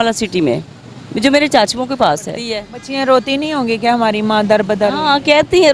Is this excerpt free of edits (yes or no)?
no